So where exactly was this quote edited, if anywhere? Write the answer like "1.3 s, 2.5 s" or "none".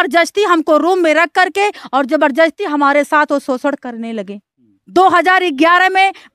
4.8 s